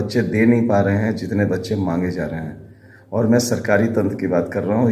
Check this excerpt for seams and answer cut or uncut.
uncut